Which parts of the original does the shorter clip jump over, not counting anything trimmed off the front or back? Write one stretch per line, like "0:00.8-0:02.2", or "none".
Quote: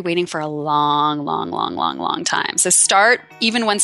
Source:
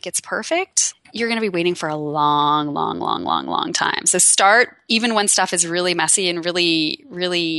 none